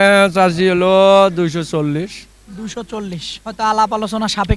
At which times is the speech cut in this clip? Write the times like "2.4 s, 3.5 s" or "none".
none